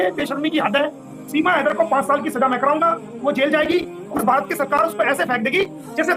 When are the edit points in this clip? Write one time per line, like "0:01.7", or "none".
0:01.1
0:04.0